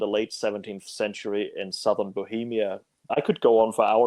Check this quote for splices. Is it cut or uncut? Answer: cut